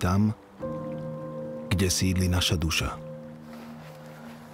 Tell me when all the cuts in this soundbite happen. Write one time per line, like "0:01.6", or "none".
0:02.8